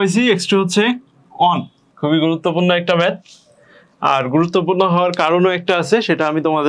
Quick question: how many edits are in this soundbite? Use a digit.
1